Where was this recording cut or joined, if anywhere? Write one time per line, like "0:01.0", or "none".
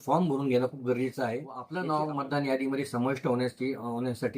0:01.6

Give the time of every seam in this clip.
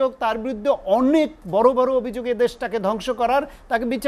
none

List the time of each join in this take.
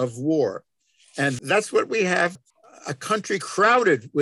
0:02.3

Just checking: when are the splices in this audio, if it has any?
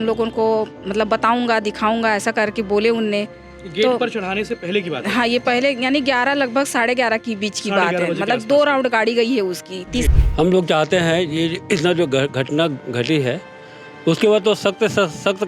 0:10.1

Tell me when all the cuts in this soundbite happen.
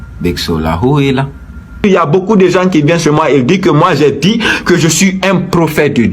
0:01.8

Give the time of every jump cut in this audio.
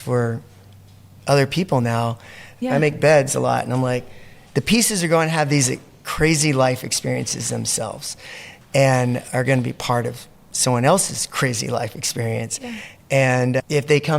0:02.5

